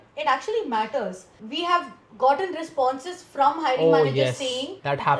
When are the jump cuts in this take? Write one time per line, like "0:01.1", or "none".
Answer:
0:01.3